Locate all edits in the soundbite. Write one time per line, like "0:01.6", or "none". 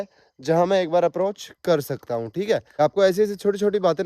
0:02.8